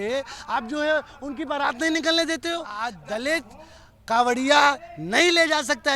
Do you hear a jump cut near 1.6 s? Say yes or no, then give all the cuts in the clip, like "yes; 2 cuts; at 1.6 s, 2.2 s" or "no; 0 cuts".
no; 1 cut; at 2.9 s